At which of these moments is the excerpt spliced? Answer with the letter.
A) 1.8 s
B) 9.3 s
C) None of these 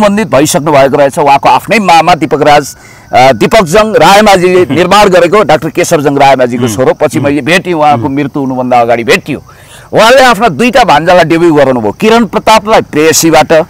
C